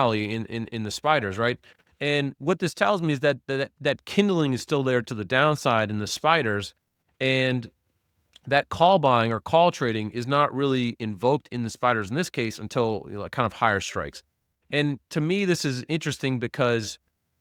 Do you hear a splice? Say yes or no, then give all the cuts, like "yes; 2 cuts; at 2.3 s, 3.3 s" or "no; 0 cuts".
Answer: no; 0 cuts